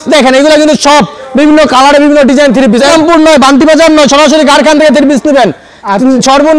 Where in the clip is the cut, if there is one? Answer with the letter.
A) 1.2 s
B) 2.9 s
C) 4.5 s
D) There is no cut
B